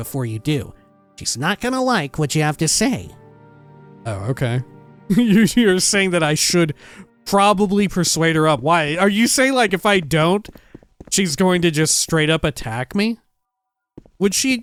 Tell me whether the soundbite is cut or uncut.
uncut